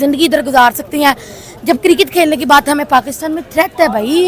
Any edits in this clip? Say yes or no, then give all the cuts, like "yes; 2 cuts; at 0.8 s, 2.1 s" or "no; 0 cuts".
no; 0 cuts